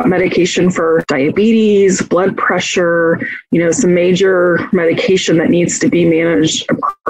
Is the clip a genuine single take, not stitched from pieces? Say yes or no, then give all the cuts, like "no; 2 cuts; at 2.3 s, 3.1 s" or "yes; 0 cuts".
no; 1 cut; at 1.1 s